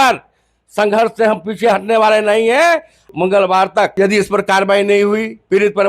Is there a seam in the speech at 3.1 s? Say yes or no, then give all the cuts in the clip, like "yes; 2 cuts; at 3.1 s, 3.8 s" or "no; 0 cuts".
yes; 2 cuts; at 3.1 s, 3.9 s